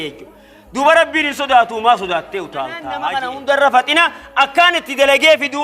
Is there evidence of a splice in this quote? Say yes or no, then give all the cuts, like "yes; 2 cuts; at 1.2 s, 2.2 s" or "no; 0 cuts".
yes; 1 cut; at 2.8 s